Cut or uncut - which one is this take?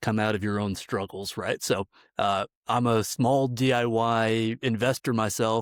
uncut